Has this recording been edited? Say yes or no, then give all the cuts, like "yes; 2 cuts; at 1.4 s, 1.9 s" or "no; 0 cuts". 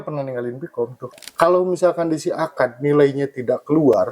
yes; 1 cut; at 1.1 s